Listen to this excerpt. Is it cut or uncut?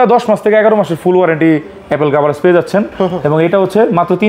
uncut